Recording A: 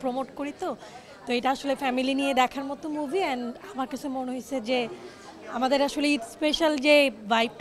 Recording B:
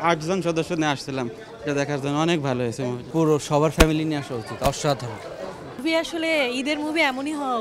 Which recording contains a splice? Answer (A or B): B